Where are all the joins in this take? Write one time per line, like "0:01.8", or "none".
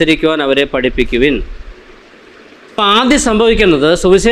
0:02.8